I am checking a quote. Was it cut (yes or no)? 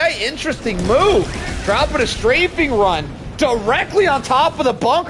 no